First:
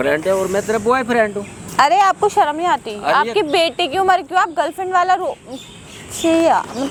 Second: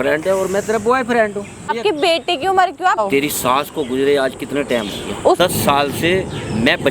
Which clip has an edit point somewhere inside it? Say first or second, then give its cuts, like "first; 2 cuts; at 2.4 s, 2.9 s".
second; 3 cuts; at 1.7 s, 3.0 s, 5.4 s